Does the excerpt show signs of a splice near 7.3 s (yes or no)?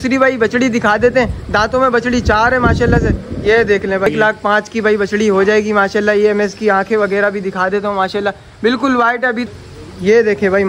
no